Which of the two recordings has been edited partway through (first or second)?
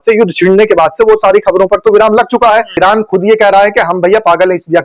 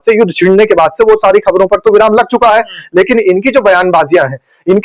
first